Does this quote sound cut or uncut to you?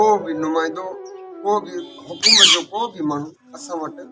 uncut